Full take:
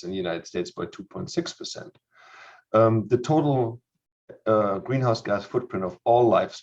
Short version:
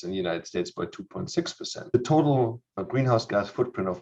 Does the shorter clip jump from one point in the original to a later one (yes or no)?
yes